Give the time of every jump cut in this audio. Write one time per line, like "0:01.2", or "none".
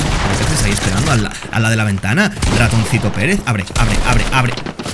none